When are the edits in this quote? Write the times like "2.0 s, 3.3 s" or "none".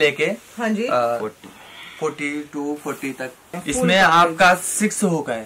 3.5 s